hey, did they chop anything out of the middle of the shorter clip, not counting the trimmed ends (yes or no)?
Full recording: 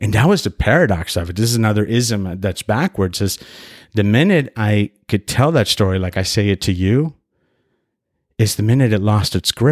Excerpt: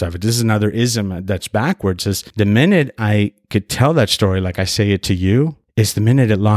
yes